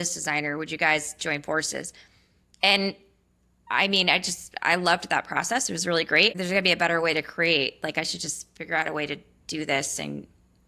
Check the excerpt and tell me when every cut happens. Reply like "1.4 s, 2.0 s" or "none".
6.4 s